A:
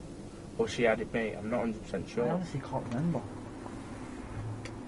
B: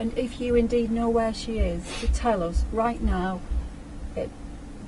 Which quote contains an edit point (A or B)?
A